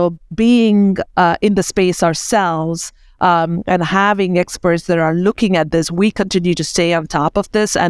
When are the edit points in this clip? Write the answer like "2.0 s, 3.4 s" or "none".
none